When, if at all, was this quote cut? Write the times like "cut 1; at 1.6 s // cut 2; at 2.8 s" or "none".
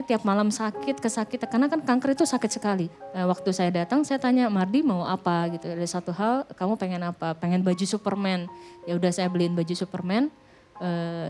none